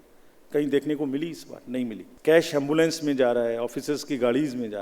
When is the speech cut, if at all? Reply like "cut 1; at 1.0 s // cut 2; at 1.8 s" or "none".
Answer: cut 1; at 2.1 s